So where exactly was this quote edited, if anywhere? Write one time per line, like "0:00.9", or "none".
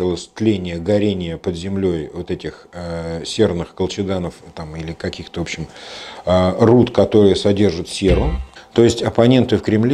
0:08.4